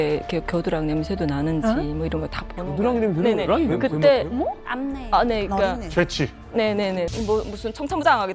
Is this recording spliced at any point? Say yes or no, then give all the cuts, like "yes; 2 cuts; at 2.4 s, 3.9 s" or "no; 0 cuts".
yes; 1 cut; at 7.2 s